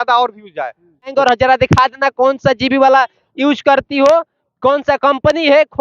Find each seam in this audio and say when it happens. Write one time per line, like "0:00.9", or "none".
0:01.1